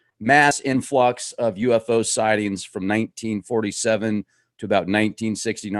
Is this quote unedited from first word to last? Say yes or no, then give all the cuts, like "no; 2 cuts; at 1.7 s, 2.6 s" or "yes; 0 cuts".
no; 1 cut; at 3.2 s